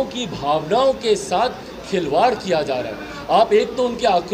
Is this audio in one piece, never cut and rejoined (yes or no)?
yes